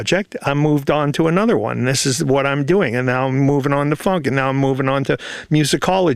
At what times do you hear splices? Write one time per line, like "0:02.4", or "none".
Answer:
none